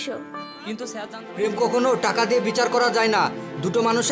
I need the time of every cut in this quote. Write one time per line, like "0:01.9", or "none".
0:00.9

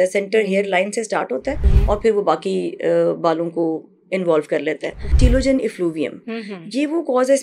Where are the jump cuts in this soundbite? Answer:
0:01.7
0:05.1

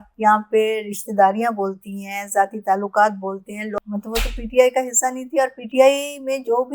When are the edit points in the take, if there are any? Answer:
0:03.8

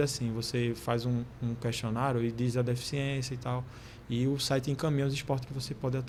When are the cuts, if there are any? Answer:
none

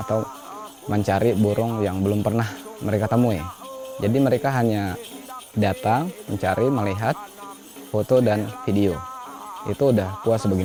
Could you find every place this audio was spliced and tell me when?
none

